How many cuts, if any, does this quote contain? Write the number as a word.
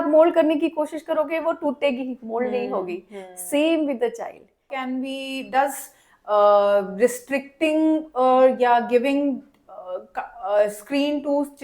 one